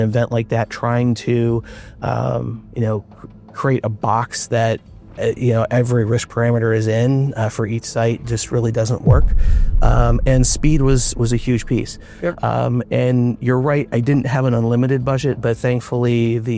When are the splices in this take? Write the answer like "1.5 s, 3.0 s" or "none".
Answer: none